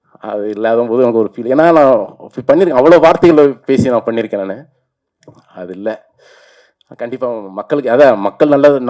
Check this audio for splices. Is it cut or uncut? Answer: uncut